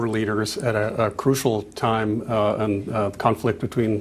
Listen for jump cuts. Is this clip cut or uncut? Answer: uncut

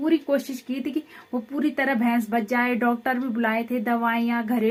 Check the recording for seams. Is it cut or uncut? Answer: uncut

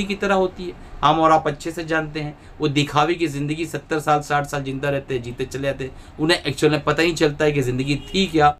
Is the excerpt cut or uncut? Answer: uncut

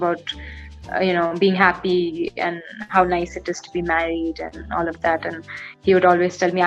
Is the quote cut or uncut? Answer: uncut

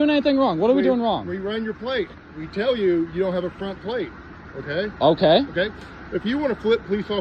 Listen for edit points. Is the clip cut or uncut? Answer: uncut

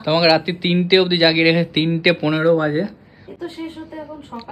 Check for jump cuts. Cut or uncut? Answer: uncut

